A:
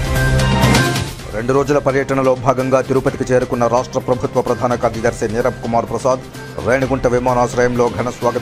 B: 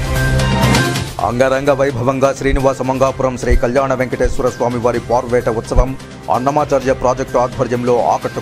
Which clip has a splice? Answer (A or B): B